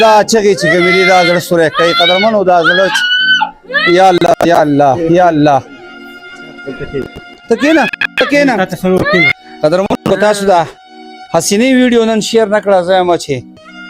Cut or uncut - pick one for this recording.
cut